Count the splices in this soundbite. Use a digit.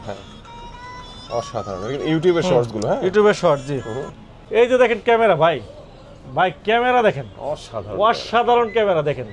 1